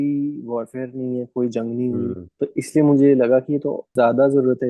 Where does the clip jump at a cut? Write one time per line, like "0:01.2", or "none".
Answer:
0:02.2
0:03.8

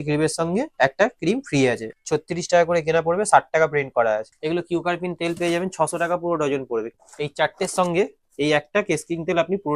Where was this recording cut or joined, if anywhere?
0:01.9
0:04.3
0:06.9

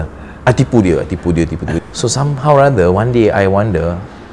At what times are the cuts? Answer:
0:01.7

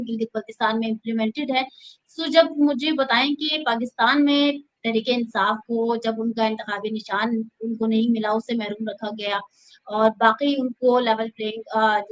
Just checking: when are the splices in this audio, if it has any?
none

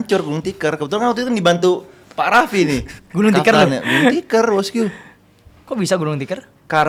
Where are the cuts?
none

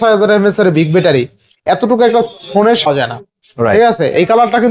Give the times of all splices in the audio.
0:02.9

